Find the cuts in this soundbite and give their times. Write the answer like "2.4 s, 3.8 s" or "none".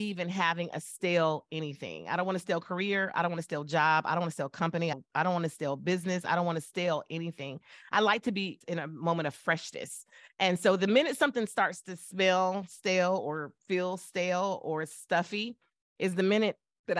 5.0 s, 8.6 s